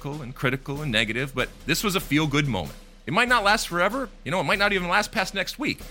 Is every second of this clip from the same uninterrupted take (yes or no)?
yes